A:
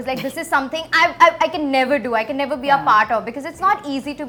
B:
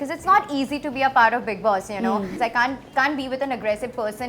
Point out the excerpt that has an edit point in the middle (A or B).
B